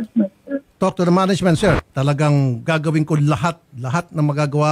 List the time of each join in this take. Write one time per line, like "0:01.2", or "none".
0:01.8